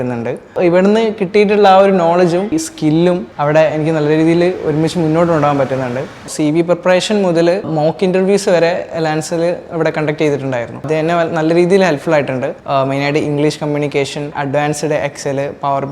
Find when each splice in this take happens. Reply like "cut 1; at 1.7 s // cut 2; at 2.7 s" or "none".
cut 1; at 2.9 s // cut 2; at 6.2 s // cut 3; at 10.8 s // cut 4; at 12.6 s